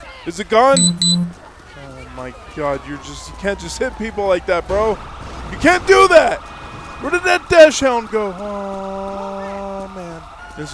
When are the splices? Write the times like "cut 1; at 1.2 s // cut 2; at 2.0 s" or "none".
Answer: none

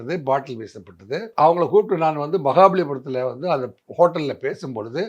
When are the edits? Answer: cut 1; at 1.3 s

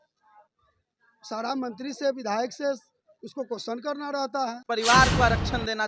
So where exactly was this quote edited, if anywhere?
cut 1; at 4.6 s

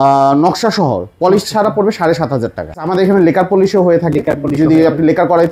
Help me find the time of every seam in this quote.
cut 1; at 2.8 s

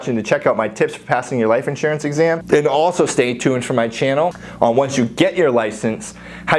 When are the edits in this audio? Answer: cut 1; at 2.4 s // cut 2; at 4.4 s

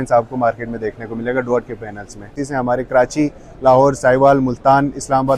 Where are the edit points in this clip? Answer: cut 1; at 2.4 s

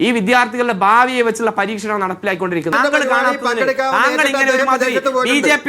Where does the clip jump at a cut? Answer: cut 1; at 2.7 s

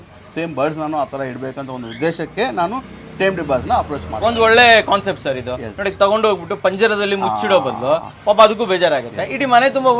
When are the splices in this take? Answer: none

